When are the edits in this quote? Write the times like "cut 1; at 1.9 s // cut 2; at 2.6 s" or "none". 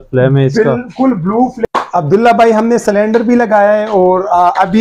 cut 1; at 1.6 s